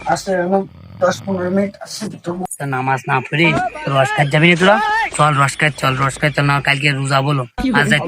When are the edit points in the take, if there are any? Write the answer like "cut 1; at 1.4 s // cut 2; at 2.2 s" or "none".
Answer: cut 1; at 2.4 s